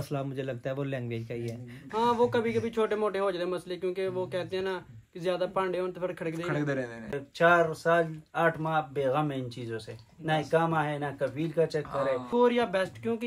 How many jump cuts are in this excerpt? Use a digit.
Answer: 3